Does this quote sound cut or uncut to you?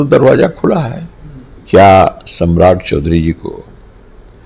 cut